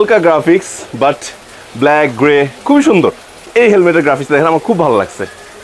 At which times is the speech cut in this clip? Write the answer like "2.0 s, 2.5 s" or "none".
3.5 s